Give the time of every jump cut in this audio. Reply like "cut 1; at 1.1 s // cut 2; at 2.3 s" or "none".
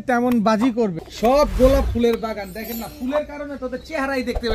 cut 1; at 1.0 s